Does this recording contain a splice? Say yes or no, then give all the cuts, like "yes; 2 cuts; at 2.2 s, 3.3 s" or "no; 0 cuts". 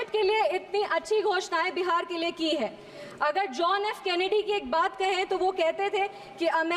no; 0 cuts